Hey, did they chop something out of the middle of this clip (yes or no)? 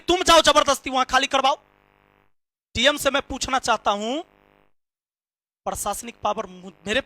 no